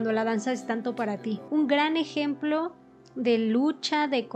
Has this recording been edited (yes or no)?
yes